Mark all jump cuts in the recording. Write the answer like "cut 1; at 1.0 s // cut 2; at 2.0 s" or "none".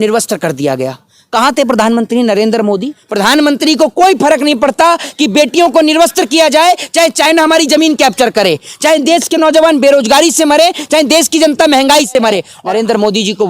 cut 1; at 3.0 s // cut 2; at 12.5 s